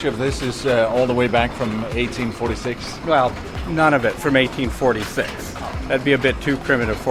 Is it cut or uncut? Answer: uncut